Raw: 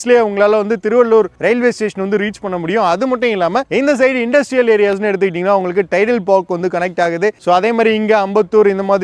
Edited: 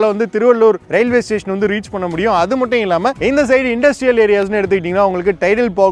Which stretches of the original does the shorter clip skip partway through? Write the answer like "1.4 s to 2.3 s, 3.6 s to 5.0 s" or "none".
none